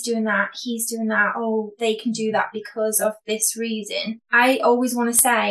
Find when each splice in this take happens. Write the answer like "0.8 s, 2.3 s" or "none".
4.2 s